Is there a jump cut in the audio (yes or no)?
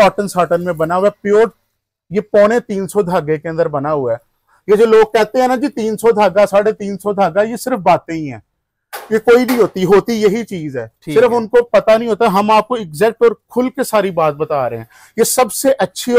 no